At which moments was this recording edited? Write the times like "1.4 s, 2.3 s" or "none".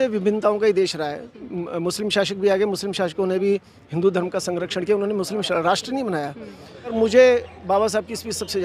6.9 s